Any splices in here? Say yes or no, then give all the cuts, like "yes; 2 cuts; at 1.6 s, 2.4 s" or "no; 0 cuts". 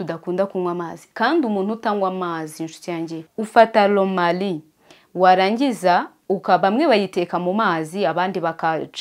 yes; 1 cut; at 3.3 s